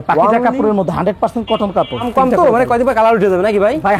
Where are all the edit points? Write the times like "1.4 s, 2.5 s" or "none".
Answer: 2.1 s